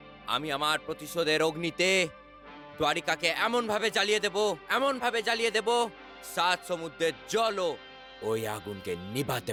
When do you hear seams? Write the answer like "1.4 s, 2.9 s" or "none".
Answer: none